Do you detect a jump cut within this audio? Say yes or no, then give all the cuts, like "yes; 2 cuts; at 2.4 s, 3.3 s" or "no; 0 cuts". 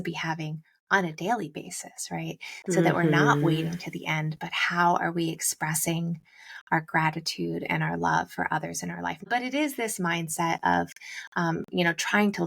yes; 1 cut; at 9.2 s